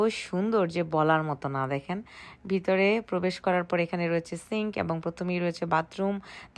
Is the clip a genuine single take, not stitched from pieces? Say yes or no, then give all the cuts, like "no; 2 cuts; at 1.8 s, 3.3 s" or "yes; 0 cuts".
yes; 0 cuts